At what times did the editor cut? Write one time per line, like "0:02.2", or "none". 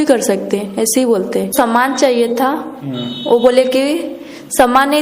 0:01.5